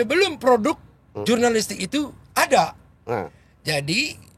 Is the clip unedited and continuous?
yes; 0 cuts

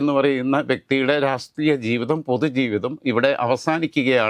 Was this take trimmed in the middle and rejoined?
no; 0 cuts

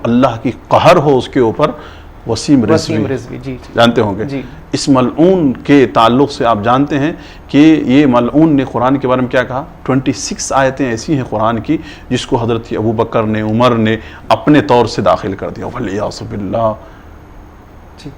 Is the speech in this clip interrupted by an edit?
no; 0 cuts

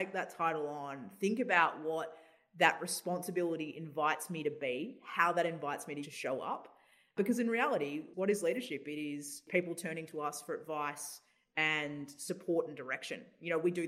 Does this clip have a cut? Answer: yes; 4 cuts; at 6.0 s, 7.1 s, 8.0 s, 9.4 s

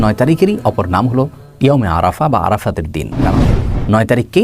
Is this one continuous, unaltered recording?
no; 1 cut; at 3.5 s

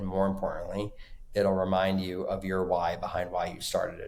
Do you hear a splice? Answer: no; 0 cuts

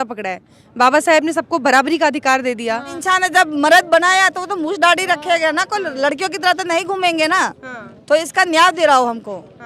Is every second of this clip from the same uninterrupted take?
no; 1 cut; at 3.0 s

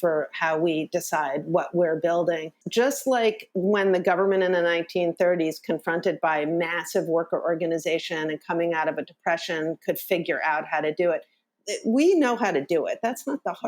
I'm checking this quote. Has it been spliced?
yes; 1 cut; at 2.6 s

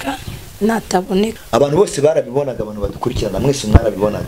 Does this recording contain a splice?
yes; 1 cut; at 1.4 s

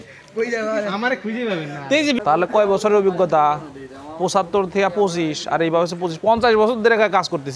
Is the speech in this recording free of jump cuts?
no; 1 cut; at 2.2 s

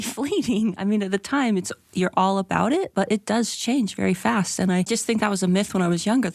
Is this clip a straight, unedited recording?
no; 1 cut; at 4.9 s

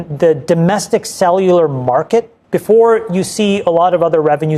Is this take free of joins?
no; 1 cut; at 2.4 s

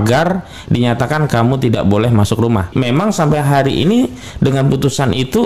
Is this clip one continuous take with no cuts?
no; 1 cut; at 2.7 s

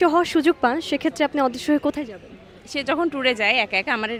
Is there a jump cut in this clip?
no; 0 cuts

